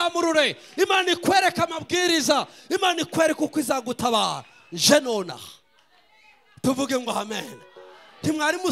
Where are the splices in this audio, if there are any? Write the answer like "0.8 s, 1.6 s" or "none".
none